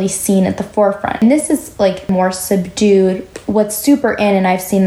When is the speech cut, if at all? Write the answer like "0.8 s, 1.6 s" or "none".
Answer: 1.2 s, 2.1 s, 3.3 s